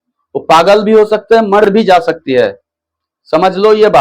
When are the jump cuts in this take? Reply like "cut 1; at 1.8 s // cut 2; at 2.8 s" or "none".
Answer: cut 1; at 1.7 s